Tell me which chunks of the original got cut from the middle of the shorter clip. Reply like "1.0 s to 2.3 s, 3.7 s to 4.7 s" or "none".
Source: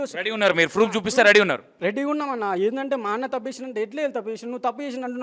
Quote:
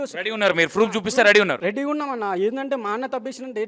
1.6 s to 1.8 s